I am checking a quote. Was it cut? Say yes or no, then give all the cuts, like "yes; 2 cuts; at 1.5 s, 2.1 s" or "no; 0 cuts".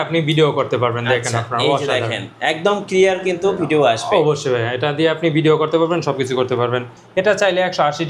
yes; 1 cut; at 6.9 s